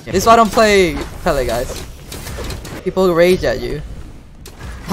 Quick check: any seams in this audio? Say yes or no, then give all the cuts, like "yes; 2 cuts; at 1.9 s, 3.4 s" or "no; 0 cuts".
yes; 1 cut; at 2.6 s